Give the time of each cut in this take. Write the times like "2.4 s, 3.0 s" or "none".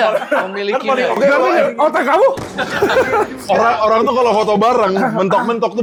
none